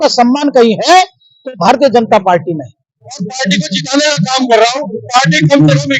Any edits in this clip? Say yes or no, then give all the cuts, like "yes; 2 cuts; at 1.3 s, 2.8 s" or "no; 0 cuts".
yes; 1 cut; at 3.1 s